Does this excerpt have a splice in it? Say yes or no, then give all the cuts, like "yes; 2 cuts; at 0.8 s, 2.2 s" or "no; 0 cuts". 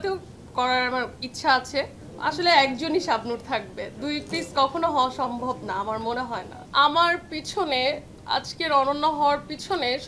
yes; 2 cuts; at 2.0 s, 6.6 s